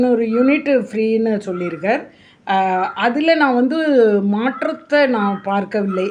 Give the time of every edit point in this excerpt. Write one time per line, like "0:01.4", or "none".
none